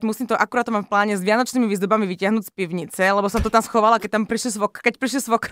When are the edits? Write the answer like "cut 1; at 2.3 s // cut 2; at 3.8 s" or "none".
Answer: none